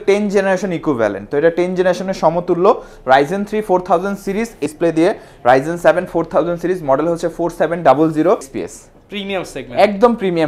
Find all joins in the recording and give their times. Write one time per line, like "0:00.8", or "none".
0:04.6
0:08.5